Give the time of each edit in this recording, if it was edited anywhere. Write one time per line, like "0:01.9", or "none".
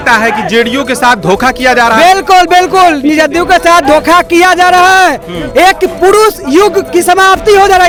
none